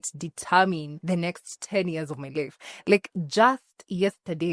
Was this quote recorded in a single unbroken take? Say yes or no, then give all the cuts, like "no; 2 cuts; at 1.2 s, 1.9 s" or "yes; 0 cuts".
no; 1 cut; at 0.9 s